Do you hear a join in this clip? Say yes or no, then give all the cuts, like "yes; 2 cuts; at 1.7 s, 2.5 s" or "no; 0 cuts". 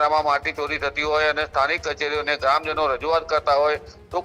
no; 0 cuts